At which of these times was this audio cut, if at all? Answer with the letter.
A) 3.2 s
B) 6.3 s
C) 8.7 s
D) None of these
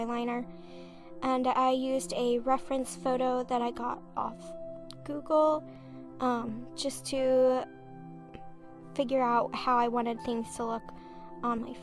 A